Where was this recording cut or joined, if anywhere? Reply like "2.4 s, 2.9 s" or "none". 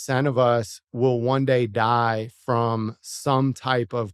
none